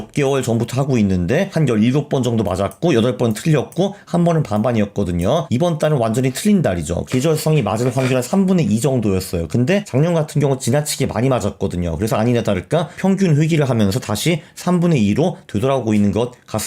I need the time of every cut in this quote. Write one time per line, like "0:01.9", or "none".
0:01.5
0:05.5
0:07.0
0:09.9
0:12.9